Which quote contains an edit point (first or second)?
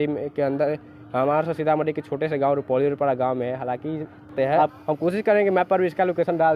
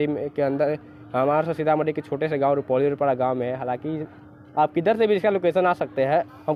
first